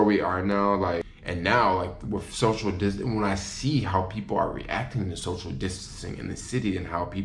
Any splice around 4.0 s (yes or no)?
no